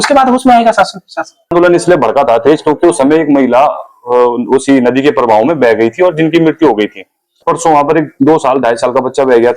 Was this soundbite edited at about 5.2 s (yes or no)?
no